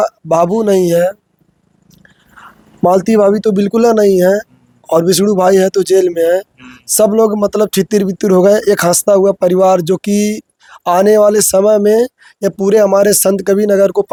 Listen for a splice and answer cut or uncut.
uncut